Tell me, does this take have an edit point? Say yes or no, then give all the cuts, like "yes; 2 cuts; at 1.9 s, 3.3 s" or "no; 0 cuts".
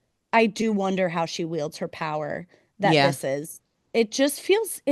no; 0 cuts